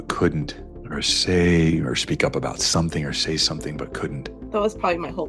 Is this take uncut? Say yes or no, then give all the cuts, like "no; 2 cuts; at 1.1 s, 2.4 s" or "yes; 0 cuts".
no; 1 cut; at 4.3 s